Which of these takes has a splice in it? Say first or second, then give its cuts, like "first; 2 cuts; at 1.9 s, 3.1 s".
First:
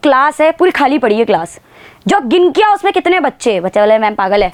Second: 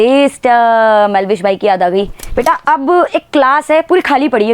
second; 1 cut; at 2.2 s